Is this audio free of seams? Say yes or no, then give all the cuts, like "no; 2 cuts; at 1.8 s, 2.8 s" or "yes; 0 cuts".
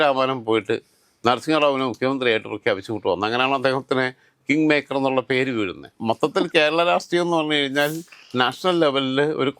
no; 1 cut; at 5.9 s